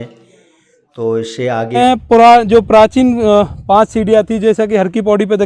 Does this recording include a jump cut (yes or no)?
yes